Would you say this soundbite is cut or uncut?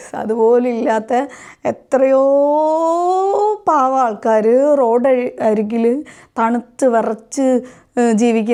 uncut